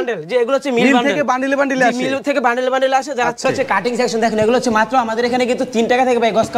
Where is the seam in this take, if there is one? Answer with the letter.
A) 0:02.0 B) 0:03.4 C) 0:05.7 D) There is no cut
B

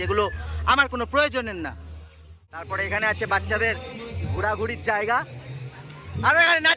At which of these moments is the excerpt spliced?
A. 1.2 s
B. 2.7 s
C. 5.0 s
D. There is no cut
B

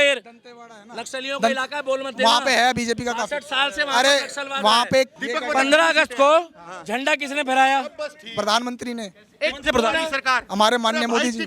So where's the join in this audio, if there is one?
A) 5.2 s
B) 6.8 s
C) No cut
A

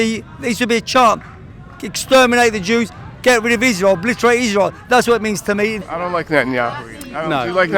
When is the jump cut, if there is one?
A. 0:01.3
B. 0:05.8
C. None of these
B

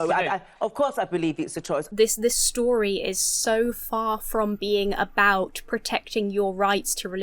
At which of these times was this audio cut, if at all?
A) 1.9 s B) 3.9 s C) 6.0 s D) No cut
A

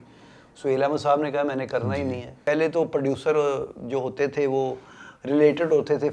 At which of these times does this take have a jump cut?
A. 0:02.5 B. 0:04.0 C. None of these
A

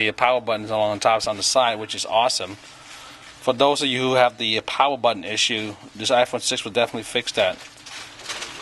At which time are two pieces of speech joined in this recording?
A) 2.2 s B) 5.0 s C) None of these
C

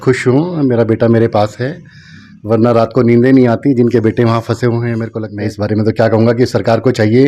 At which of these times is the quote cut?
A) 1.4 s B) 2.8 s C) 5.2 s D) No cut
C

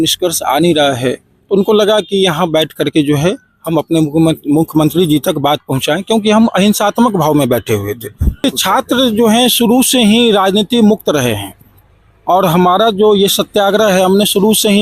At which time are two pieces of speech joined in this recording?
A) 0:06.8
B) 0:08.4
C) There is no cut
B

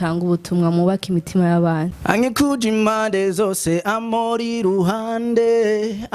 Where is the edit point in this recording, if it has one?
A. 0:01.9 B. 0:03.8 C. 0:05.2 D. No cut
A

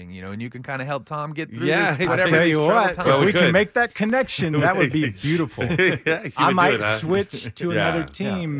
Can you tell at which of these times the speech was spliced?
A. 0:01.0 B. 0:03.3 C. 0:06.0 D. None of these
D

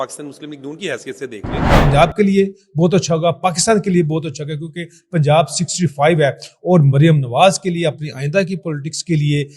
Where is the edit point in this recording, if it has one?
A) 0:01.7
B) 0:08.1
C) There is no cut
A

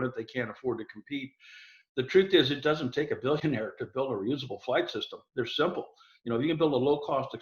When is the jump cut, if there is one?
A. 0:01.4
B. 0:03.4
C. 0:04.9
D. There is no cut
B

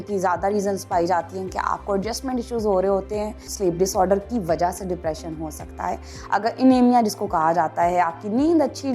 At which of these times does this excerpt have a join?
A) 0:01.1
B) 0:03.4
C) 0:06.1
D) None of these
B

